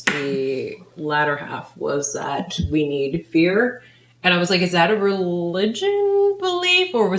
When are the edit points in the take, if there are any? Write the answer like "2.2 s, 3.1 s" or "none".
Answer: none